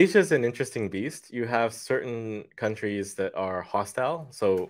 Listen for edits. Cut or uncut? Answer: cut